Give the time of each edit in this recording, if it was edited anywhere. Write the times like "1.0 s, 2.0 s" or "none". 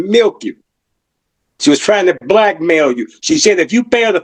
none